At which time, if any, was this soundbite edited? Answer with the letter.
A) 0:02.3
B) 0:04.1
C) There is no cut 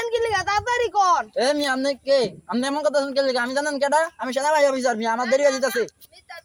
C